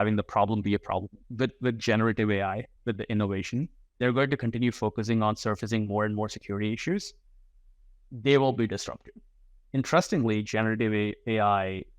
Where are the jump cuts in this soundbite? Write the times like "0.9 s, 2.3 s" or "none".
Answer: 1.2 s, 2.7 s, 3.8 s